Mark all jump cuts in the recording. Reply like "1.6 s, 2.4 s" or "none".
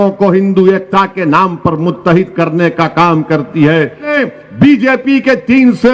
4.1 s